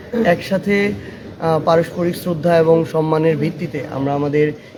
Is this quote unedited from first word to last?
yes; 0 cuts

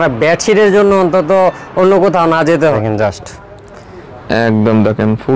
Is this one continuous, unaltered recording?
no; 1 cut; at 2.8 s

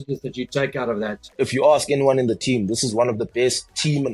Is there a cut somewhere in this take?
yes; 1 cut; at 1.2 s

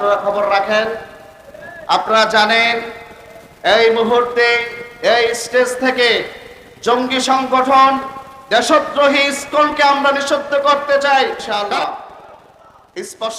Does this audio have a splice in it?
yes; 1 cut; at 11.4 s

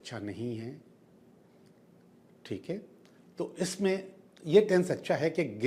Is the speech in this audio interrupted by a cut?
no; 0 cuts

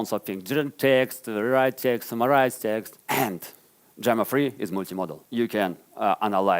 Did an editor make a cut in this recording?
yes; 2 cuts; at 2.9 s, 5.2 s

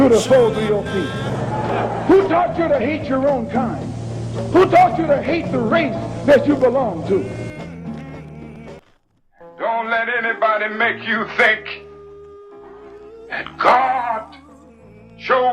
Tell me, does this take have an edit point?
yes; 1 cut; at 8.8 s

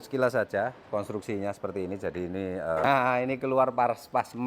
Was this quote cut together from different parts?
yes; 1 cut; at 2.8 s

